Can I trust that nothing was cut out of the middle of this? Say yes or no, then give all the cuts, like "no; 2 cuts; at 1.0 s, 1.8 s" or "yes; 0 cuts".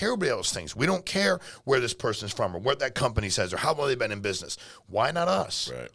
yes; 0 cuts